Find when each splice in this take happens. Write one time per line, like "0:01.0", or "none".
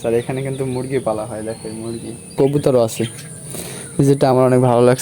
0:02.3